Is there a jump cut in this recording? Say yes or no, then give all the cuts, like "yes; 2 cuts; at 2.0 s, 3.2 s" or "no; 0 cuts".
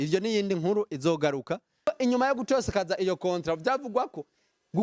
yes; 1 cut; at 1.9 s